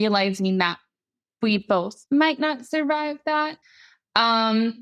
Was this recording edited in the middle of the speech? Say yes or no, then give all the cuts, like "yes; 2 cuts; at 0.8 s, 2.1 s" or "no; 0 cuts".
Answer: yes; 2 cuts; at 1.9 s, 3.6 s